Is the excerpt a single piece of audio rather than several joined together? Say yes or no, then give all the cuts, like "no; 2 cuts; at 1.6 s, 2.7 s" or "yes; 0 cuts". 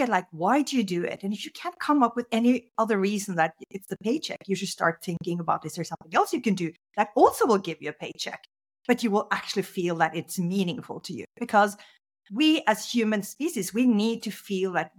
yes; 0 cuts